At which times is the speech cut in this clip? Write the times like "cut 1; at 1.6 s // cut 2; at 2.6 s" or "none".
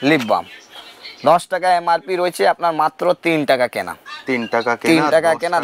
none